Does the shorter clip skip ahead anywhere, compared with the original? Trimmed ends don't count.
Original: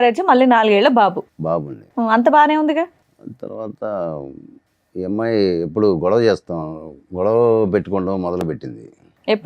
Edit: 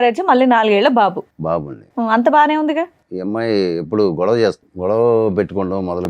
yes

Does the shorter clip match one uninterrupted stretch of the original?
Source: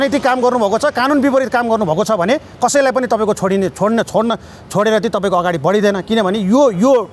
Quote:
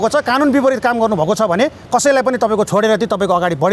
no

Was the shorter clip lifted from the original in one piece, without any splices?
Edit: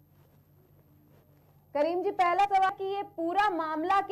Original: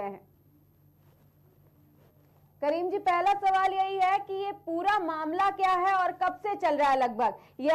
no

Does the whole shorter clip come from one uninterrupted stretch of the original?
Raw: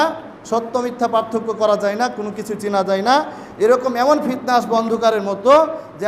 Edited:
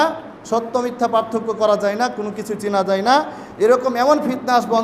yes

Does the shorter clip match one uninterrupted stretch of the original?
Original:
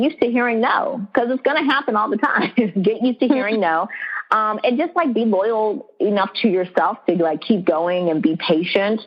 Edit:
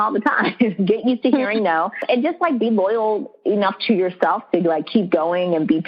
no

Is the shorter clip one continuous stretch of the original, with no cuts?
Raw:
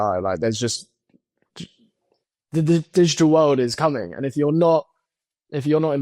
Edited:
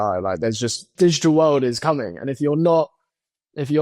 no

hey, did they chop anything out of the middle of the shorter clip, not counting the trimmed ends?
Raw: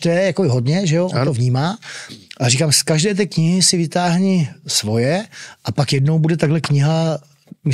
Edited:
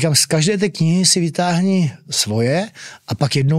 no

